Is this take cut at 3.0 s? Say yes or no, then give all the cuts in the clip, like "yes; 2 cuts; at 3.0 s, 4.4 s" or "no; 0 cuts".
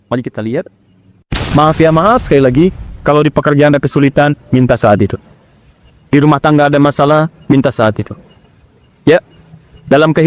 no; 1 cut; at 1.3 s